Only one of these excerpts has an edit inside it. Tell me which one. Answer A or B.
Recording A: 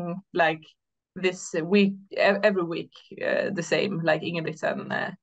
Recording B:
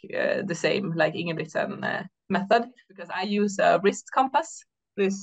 B